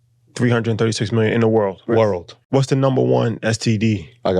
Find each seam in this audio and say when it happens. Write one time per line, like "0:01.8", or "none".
0:02.4